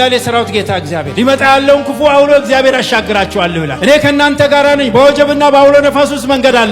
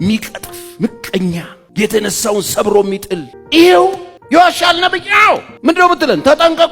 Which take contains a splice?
second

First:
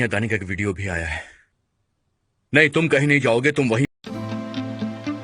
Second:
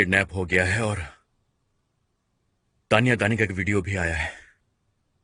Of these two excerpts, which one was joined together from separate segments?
first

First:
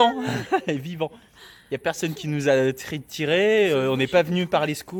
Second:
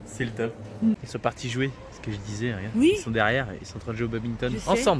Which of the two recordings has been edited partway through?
second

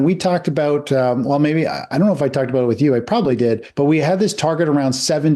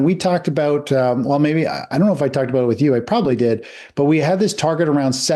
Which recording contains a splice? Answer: first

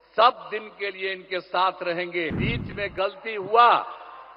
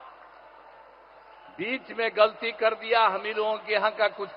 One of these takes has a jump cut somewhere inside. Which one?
first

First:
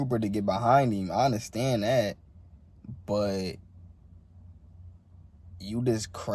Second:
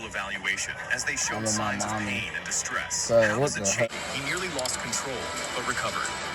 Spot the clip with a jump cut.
second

